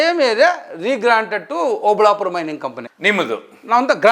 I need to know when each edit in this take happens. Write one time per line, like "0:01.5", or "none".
0:02.8